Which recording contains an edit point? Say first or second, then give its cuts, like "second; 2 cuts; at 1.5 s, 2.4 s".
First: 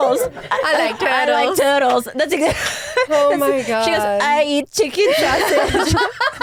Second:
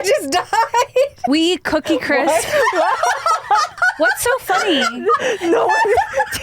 second; 2 cuts; at 1.2 s, 3.7 s